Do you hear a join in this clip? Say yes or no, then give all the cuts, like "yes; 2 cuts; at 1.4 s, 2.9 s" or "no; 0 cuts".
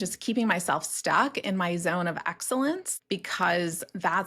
yes; 1 cut; at 2.9 s